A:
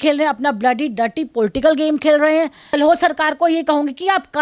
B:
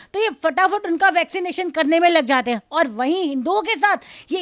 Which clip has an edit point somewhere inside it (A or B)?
A